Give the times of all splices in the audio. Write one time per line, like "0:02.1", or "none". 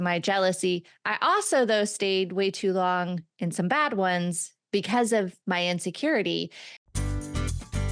0:06.9

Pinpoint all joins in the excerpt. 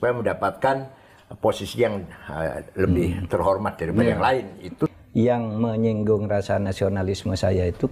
0:05.0

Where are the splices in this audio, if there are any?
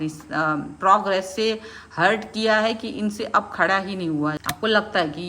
0:04.4

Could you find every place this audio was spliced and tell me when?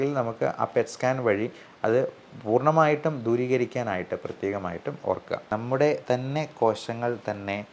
0:05.4

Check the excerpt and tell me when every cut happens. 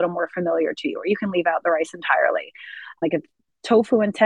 0:03.0

